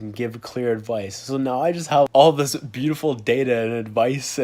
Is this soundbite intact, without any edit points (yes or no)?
no